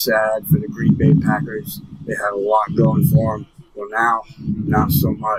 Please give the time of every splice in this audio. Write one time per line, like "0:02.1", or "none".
none